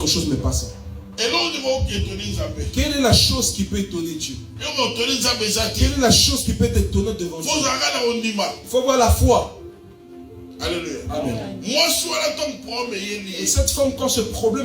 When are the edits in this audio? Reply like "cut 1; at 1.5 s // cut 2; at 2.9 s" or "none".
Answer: none